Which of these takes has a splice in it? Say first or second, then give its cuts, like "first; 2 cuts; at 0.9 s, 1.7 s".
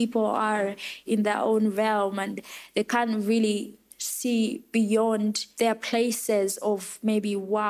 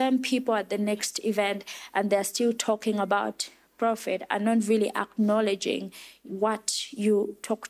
first; 2 cuts; at 1.0 s, 5.4 s